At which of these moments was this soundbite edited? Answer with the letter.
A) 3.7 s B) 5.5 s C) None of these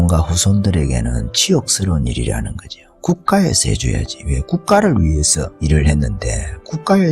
B